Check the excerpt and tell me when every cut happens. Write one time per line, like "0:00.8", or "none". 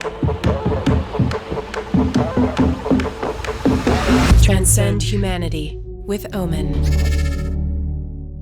none